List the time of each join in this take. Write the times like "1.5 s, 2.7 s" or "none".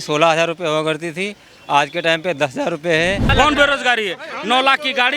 3.3 s